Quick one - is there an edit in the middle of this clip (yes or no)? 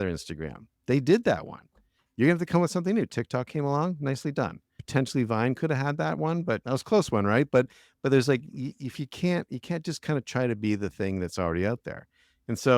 no